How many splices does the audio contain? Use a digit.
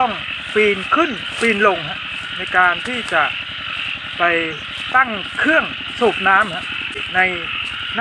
1